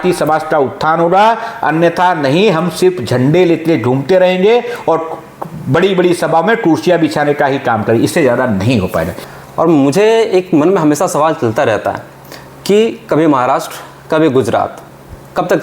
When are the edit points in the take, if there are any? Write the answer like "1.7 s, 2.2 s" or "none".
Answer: 9.2 s